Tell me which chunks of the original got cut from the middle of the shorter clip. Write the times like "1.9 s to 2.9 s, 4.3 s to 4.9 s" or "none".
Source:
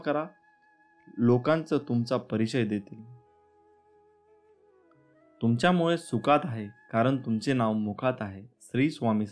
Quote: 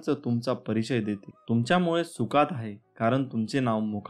3.0 s to 5.2 s